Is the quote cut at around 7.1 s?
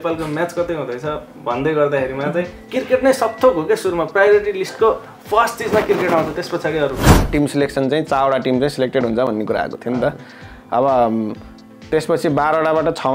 yes; 2 cuts; at 2.6 s, 7.1 s

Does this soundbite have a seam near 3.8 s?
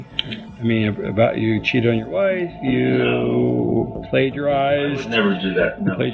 no; 1 cut; at 1.0 s

